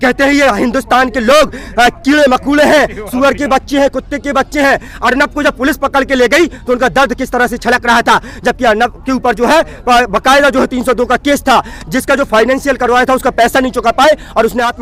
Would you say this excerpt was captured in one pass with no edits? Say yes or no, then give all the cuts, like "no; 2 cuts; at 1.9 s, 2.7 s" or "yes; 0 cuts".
yes; 0 cuts